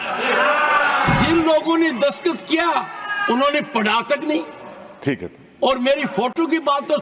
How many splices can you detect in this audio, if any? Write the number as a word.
one